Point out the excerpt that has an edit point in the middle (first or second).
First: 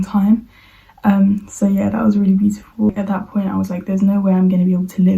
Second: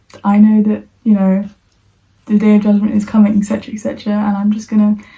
first